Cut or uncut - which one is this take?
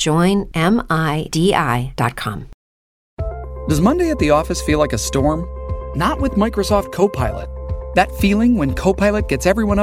cut